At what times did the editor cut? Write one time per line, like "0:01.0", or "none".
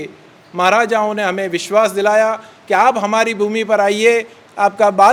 none